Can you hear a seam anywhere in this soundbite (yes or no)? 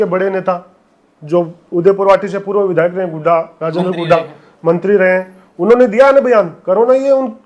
no